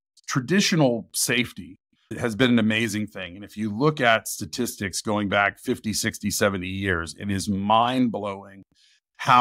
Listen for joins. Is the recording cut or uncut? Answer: uncut